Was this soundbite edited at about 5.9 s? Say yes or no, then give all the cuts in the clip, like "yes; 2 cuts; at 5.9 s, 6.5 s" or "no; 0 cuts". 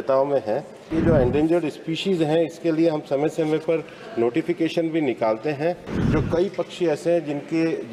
yes; 2 cuts; at 0.9 s, 5.9 s